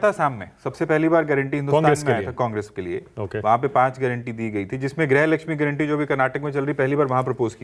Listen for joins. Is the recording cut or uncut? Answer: uncut